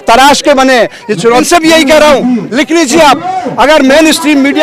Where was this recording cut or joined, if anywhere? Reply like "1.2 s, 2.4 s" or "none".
1.4 s